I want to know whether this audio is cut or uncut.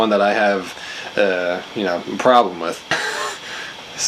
cut